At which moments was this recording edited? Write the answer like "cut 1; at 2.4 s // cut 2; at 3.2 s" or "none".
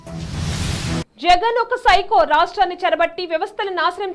cut 1; at 1.1 s